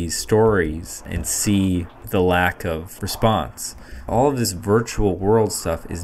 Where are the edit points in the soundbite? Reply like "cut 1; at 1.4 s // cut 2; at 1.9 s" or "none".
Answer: cut 1; at 1.2 s // cut 2; at 2.0 s // cut 3; at 2.9 s // cut 4; at 3.9 s